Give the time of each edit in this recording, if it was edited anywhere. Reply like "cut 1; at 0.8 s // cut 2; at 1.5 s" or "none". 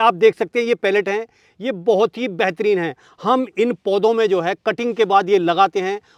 none